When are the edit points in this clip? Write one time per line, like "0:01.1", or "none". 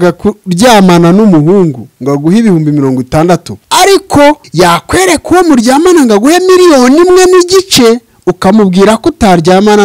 0:03.6
0:04.5